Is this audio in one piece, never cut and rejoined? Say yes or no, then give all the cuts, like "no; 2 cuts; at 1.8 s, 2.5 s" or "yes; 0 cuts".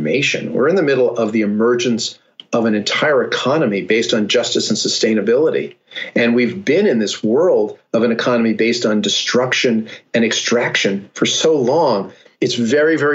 no; 1 cut; at 12.2 s